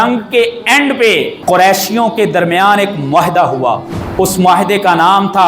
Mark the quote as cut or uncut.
cut